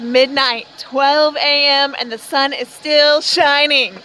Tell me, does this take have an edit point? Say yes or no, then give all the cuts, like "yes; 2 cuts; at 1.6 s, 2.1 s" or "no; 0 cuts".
no; 0 cuts